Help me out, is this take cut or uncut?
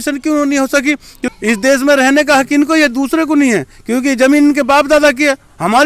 cut